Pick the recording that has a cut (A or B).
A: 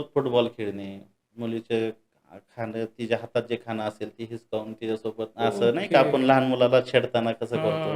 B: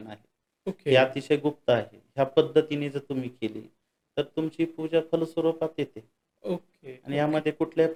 A